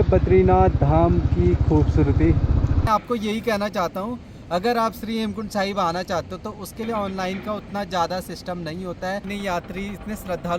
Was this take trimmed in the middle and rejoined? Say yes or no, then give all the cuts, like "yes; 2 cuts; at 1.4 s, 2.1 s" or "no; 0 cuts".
yes; 2 cuts; at 2.9 s, 9.2 s